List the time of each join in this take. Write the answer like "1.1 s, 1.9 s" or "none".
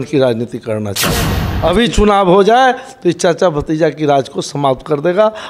1.4 s